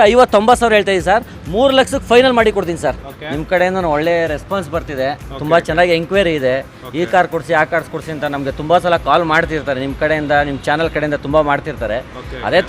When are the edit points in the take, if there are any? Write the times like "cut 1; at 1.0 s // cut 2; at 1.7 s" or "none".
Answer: cut 1; at 3.1 s

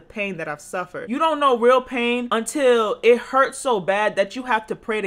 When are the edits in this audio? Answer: cut 1; at 1.0 s // cut 2; at 2.3 s

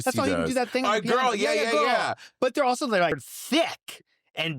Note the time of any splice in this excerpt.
cut 1; at 3.3 s

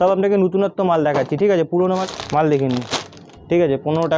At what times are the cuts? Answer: cut 1; at 2.0 s

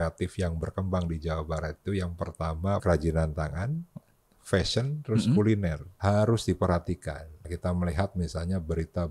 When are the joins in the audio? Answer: cut 1; at 2.8 s // cut 2; at 5.9 s // cut 3; at 7.4 s

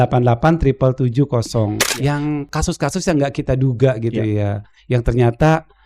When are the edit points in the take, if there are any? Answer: cut 1; at 1.9 s

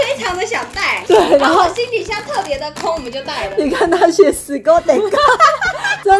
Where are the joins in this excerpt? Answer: none

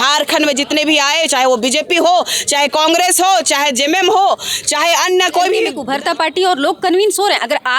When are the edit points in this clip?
cut 1; at 5.8 s

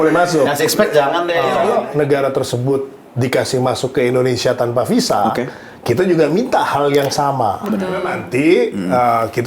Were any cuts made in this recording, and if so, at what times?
cut 1; at 1.6 s // cut 2; at 8.1 s

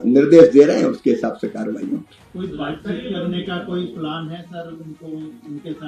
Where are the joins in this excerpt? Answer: none

